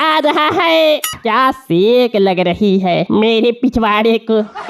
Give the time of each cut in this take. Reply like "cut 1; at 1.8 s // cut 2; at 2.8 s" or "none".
cut 1; at 1.1 s